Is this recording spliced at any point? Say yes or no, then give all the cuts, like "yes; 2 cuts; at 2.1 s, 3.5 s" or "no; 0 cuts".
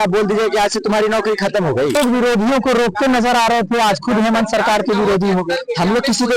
yes; 1 cut; at 2.0 s